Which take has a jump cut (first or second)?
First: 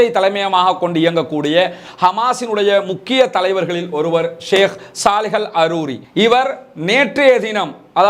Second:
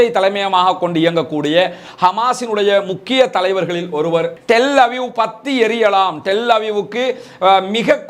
second